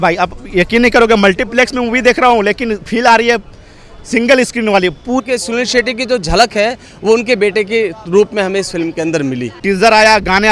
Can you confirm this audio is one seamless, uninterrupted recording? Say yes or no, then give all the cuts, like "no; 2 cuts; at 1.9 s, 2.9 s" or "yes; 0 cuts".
no; 2 cuts; at 5.2 s, 9.5 s